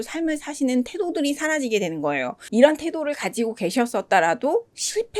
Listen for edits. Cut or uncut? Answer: cut